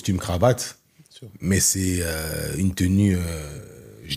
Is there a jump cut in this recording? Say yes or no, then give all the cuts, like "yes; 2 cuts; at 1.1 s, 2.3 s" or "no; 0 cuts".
no; 0 cuts